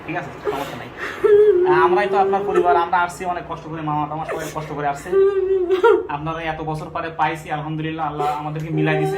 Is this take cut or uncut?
uncut